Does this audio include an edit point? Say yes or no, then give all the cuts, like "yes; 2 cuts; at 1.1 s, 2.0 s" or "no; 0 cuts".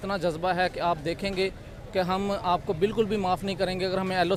no; 0 cuts